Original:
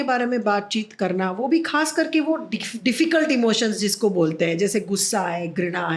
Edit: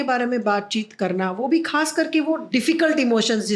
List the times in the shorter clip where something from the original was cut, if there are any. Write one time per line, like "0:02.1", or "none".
0:02.4